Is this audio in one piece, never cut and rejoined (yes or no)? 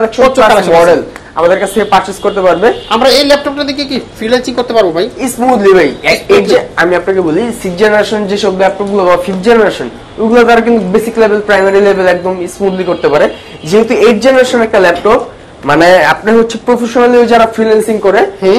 yes